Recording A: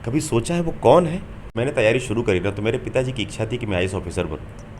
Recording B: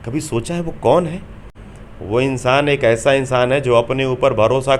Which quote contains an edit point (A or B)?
A